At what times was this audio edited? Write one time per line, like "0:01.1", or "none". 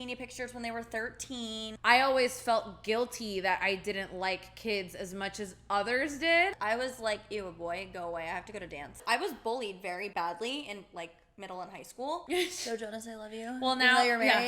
0:01.6
0:06.6
0:09.0
0:10.1
0:12.2